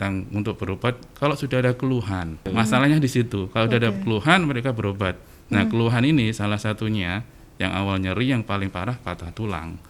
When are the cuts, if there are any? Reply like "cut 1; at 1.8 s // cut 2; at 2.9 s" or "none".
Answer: cut 1; at 2.4 s